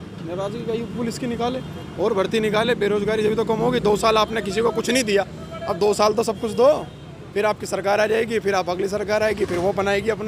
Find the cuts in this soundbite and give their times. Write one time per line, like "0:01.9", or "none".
none